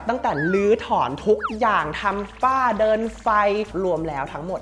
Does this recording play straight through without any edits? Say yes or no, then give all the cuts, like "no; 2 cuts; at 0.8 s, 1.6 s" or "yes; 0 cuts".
no; 1 cut; at 3.7 s